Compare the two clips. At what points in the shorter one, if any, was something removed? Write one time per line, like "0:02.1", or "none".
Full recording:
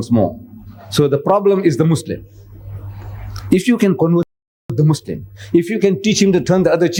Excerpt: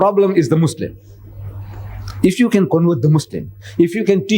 0:03.0